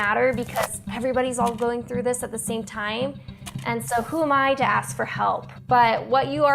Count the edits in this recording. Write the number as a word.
one